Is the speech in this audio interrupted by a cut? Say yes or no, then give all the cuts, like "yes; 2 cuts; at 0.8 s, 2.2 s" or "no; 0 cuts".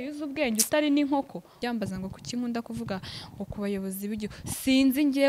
yes; 1 cut; at 1.5 s